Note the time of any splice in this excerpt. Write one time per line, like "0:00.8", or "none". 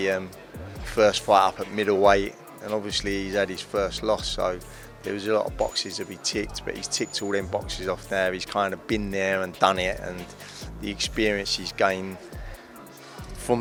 none